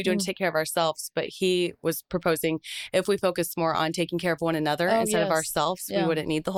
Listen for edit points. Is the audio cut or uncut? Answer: uncut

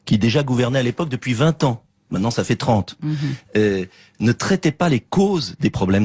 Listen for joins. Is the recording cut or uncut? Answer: uncut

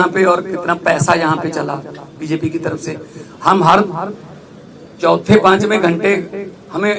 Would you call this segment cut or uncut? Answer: uncut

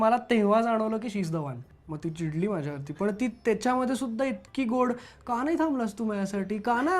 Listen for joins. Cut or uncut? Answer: cut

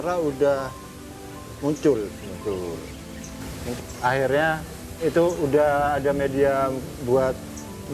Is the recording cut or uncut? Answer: cut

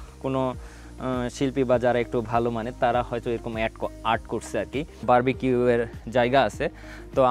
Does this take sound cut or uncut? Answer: cut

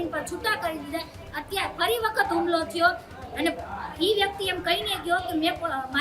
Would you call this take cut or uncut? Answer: cut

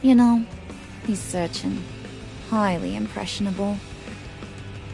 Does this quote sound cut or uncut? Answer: cut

